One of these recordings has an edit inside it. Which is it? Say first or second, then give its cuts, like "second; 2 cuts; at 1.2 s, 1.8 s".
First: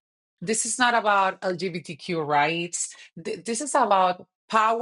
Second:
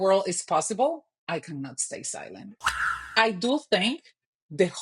second; 1 cut; at 2.6 s